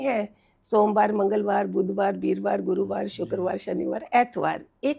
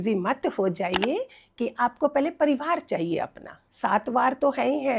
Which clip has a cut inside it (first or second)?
second